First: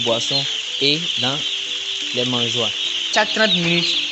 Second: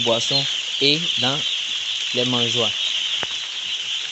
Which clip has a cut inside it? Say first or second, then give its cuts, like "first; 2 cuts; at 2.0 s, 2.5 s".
first; 1 cut; at 3.1 s